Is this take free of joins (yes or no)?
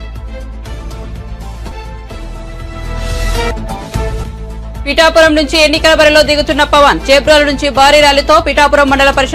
no